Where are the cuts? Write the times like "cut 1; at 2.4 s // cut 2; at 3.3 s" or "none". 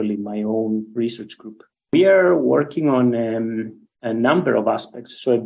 cut 1; at 1.8 s